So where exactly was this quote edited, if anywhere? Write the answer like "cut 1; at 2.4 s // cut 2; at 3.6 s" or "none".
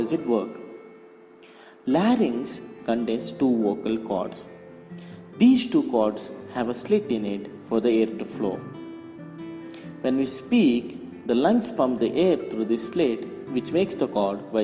cut 1; at 13.4 s